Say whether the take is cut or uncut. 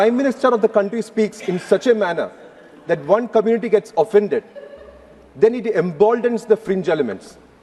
uncut